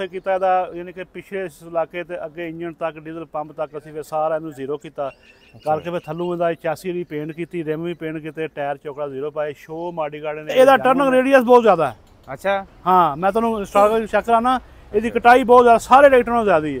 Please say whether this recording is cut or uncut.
cut